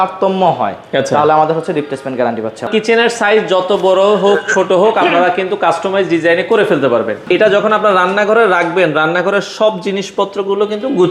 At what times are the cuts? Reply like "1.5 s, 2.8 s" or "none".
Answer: 2.7 s, 7.2 s